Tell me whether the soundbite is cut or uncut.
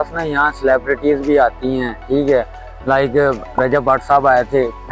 uncut